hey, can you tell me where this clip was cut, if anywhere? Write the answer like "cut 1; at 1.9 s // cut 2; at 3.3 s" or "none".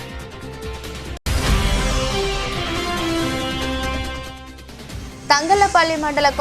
cut 1; at 1.2 s // cut 2; at 3.9 s // cut 3; at 5.1 s